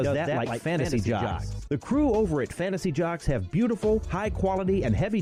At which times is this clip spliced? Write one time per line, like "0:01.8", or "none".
none